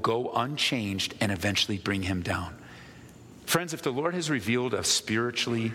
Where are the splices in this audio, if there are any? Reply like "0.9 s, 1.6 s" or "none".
3.4 s